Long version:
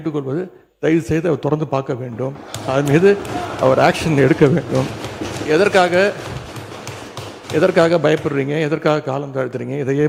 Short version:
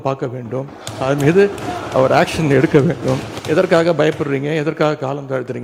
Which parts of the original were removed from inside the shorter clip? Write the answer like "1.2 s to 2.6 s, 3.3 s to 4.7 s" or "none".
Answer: 5.0 s to 7.4 s

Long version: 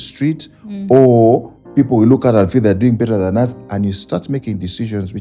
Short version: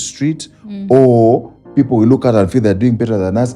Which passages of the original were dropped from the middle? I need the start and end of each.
none

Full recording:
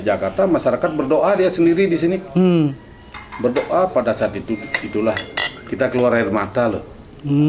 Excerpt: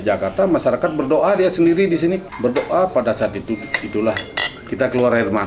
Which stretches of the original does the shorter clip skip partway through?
2.2 s to 3.2 s

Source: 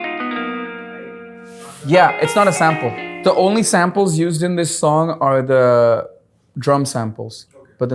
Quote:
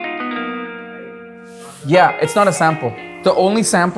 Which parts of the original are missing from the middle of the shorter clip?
none

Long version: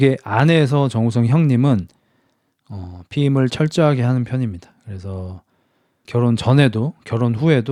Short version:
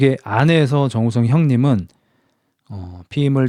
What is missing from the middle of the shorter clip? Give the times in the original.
none

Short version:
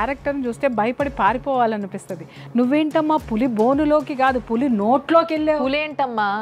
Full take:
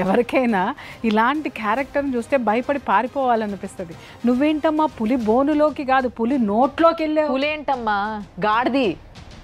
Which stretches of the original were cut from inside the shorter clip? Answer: none

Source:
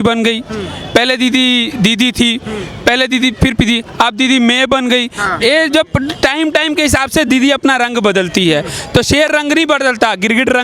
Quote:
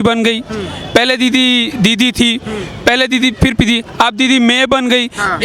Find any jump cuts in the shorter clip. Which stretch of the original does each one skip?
none

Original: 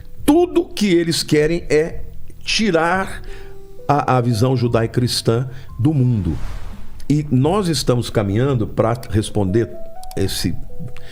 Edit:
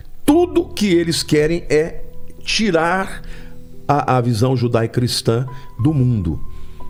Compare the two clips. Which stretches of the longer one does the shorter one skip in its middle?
none

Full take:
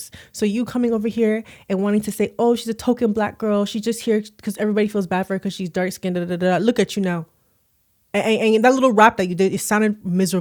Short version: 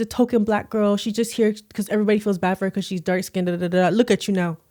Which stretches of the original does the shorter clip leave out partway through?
none

